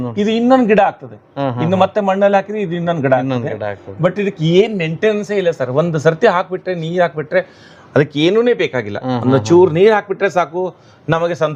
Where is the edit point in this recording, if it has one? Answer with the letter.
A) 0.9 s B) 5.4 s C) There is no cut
C